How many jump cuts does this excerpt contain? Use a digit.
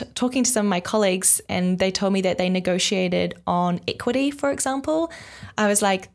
0